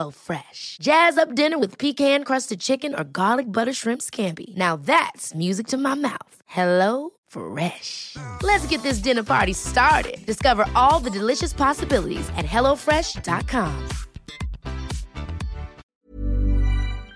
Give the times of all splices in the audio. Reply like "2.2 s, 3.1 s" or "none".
15.8 s